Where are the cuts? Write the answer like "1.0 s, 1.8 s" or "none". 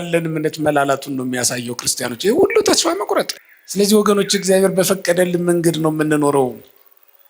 3.3 s